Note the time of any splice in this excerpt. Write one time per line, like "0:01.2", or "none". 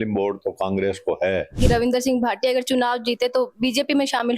0:01.6